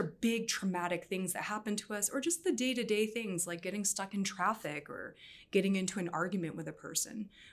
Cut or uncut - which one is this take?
uncut